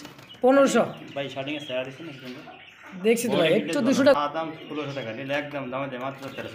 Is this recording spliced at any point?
yes; 1 cut; at 4.2 s

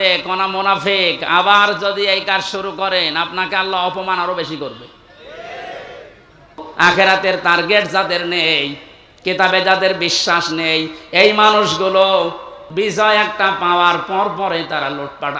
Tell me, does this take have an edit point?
yes; 2 cuts; at 6.6 s, 12.6 s

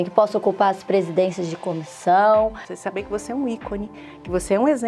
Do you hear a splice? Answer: yes; 1 cut; at 2.7 s

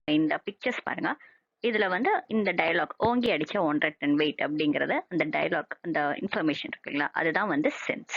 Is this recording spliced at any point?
yes; 1 cut; at 3.5 s

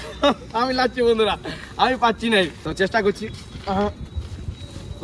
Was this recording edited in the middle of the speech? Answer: yes; 1 cut; at 2.6 s

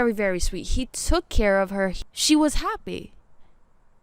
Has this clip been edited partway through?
yes; 1 cut; at 2.0 s

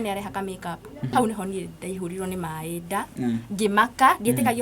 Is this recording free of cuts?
no; 1 cut; at 1.1 s

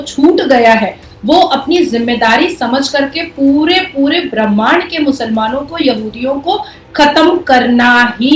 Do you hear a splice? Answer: no; 0 cuts

